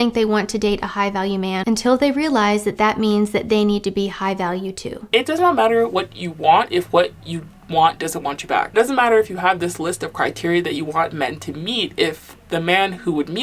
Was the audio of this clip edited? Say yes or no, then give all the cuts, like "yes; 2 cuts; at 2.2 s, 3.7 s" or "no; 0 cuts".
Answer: yes; 2 cuts; at 5.0 s, 8.7 s